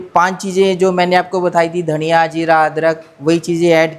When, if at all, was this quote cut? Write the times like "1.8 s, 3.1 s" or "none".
none